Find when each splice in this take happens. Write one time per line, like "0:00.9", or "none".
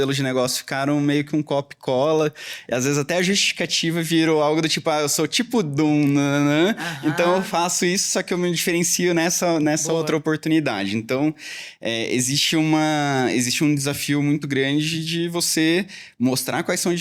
none